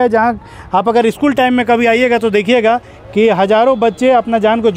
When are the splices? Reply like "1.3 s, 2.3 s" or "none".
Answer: none